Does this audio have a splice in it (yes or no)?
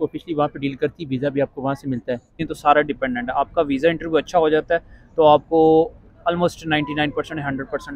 yes